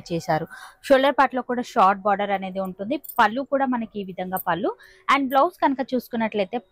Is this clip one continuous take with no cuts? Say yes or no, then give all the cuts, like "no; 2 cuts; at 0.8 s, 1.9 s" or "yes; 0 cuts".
yes; 0 cuts